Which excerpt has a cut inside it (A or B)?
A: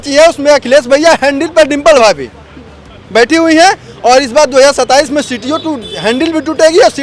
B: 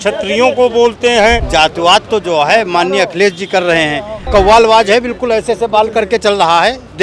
B